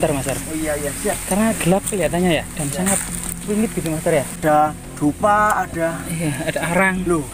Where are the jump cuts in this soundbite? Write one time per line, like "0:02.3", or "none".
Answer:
0:04.3